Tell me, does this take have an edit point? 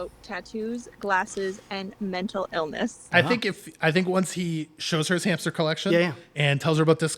yes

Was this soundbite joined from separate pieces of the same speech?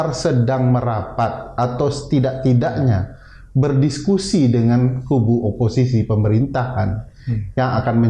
no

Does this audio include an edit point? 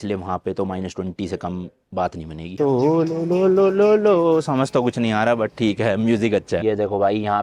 yes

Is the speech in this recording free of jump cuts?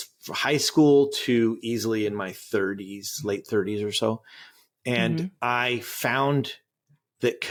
yes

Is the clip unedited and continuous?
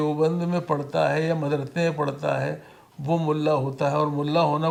yes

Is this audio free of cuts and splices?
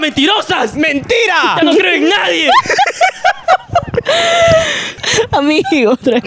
no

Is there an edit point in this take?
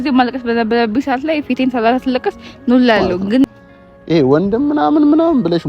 yes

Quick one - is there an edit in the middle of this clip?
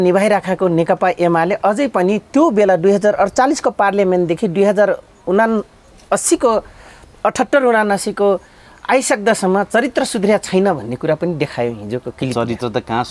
no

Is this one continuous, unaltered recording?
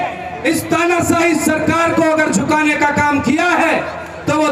yes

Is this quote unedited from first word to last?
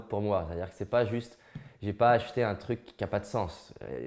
yes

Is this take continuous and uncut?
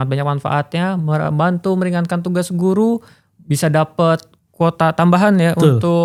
yes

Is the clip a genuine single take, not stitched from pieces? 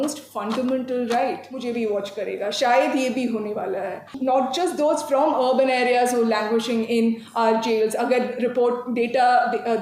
no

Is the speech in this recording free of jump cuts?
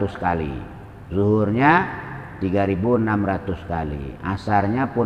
yes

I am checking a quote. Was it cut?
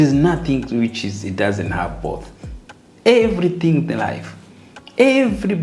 no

